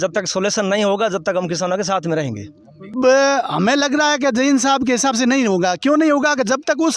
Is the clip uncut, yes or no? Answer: no